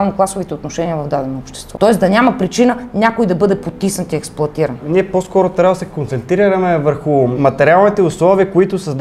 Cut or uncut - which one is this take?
cut